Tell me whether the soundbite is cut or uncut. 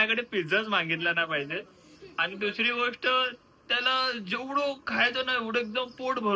uncut